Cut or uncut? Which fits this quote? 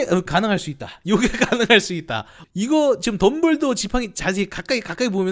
uncut